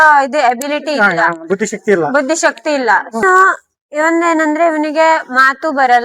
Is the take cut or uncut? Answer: cut